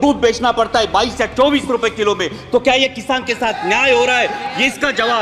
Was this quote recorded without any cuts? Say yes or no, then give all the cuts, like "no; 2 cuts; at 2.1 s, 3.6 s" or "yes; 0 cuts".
yes; 0 cuts